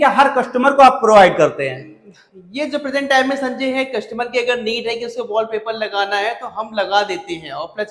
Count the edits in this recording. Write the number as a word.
zero